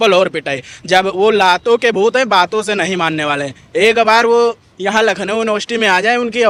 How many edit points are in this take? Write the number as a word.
zero